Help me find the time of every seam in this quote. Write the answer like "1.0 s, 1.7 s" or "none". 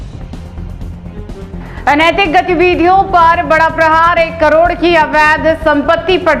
0.9 s